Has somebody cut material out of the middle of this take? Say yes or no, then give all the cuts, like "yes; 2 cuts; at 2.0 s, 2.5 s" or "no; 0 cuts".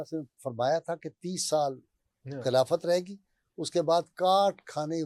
no; 0 cuts